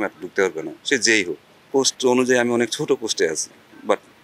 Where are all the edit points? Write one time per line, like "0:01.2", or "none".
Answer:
0:01.7